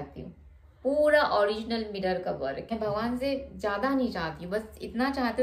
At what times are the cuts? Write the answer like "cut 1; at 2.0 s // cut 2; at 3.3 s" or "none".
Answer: cut 1; at 2.6 s